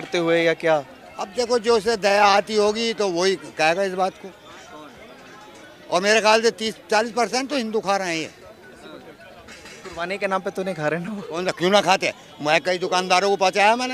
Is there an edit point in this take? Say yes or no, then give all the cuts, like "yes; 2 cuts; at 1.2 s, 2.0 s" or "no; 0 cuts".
no; 0 cuts